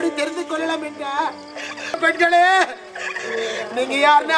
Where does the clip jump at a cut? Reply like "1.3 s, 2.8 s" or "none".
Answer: 2.0 s

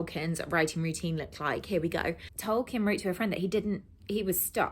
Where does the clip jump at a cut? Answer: 2.3 s

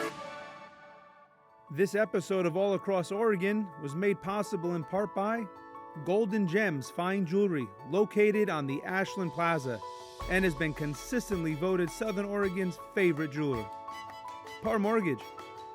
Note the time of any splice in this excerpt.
1.3 s

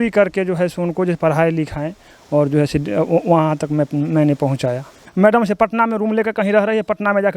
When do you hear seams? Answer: 5.0 s

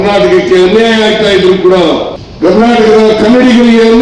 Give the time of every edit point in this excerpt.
2.2 s

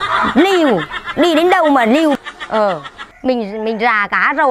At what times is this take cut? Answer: 2.2 s

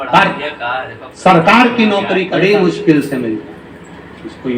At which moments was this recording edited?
2.3 s

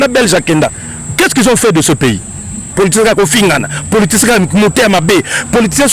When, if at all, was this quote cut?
2.7 s

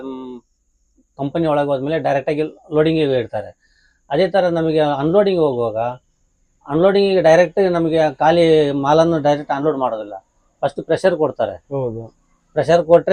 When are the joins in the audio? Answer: none

